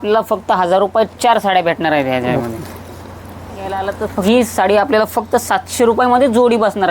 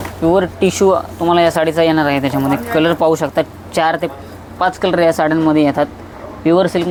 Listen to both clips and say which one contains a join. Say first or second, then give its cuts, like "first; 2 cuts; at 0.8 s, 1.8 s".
first; 1 cut; at 3.8 s